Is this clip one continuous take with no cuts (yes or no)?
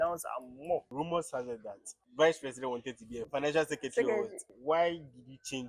no